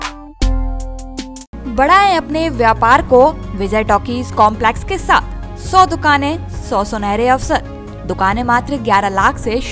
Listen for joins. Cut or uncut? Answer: uncut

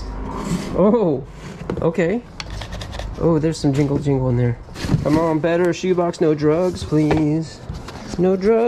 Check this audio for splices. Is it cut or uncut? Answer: cut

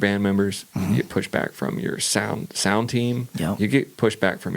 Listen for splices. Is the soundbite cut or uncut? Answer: uncut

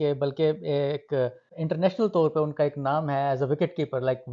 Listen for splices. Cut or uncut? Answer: cut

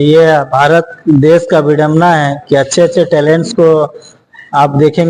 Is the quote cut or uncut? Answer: uncut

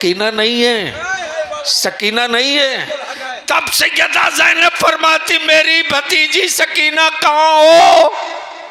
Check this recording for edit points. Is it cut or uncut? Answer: uncut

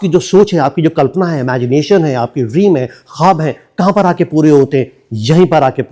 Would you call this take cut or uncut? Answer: uncut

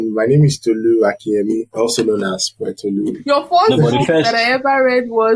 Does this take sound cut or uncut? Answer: cut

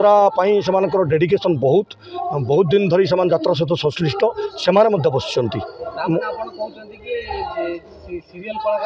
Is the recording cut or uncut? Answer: uncut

